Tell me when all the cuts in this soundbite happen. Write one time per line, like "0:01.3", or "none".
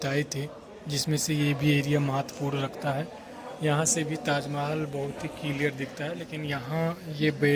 none